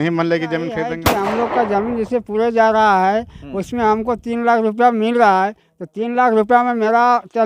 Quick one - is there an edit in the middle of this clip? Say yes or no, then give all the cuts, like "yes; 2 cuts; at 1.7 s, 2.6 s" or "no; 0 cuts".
yes; 1 cut; at 1.0 s